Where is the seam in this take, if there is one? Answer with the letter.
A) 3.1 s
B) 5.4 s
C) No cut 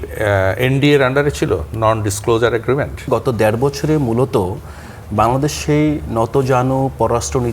A